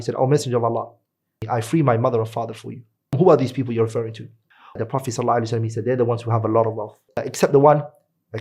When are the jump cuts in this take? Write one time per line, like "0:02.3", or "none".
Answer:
0:01.3
0:03.1
0:04.8
0:07.2